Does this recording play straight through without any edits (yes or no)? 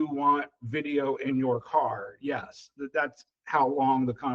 yes